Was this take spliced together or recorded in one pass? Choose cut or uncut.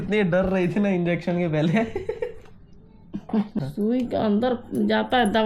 cut